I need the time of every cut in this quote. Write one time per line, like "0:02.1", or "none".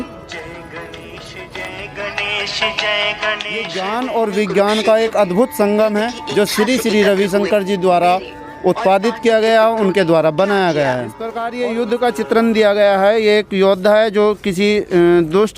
0:03.8
0:11.4

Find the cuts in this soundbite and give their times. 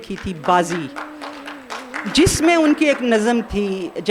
none

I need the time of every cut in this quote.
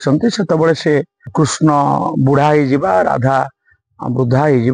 0:01.3

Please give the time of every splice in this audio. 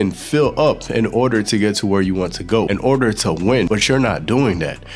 0:02.7
0:03.7

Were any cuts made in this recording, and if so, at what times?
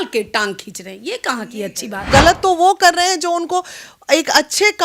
0:02.1

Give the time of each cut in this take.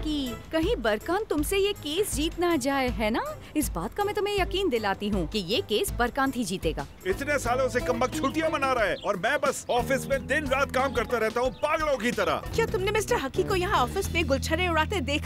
0:06.9
0:12.5

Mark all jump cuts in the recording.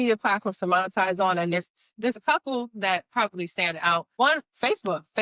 none

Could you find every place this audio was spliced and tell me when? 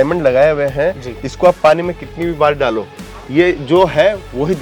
none

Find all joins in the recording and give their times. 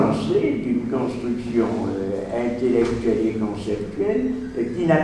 0:02.1

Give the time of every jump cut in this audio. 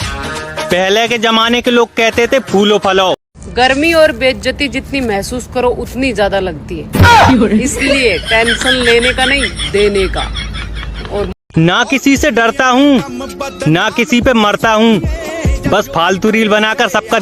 0:03.4
0:11.9

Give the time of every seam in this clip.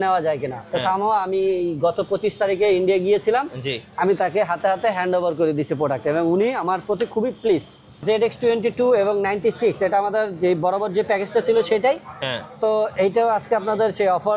0:08.0

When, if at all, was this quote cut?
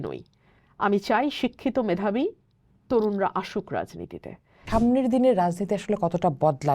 0:04.6

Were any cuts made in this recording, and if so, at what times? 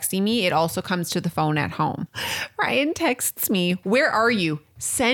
0:02.1
0:03.8

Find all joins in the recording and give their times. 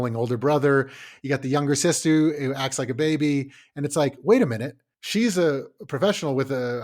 0:01.1

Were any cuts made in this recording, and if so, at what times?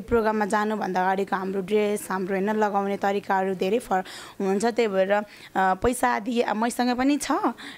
none

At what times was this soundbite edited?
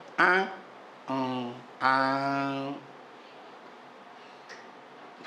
none

